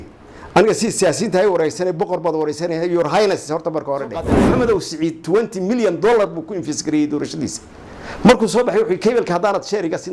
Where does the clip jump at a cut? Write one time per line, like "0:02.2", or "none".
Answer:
0:04.4